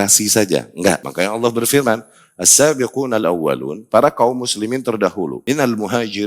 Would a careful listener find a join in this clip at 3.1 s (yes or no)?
no